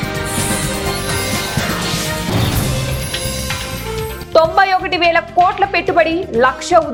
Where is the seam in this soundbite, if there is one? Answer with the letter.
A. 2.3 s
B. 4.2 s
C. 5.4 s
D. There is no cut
D